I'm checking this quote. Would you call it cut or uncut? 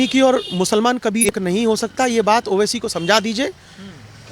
cut